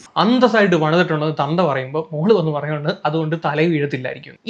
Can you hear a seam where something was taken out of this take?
no; 0 cuts

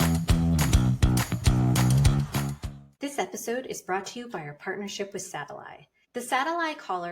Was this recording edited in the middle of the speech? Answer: no; 0 cuts

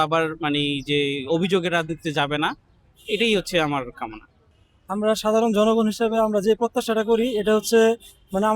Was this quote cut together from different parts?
no; 0 cuts

